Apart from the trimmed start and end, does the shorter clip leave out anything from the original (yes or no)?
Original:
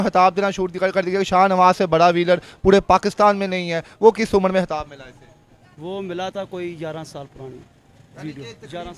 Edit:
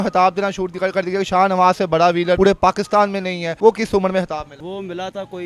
yes